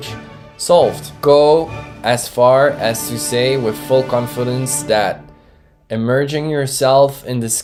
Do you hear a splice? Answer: no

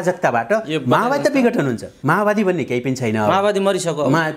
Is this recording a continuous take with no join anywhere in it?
no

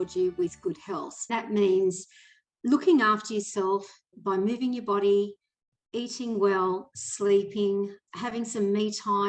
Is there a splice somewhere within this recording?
yes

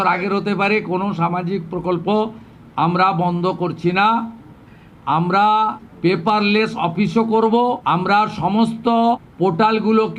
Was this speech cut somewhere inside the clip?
yes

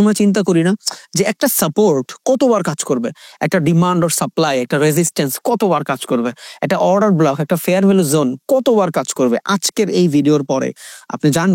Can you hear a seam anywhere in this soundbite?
no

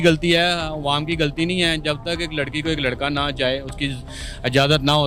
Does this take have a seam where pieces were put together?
no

